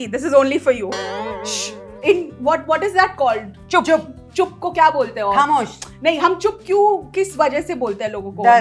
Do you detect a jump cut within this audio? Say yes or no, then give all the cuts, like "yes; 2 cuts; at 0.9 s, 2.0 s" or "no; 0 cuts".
yes; 1 cut; at 1.2 s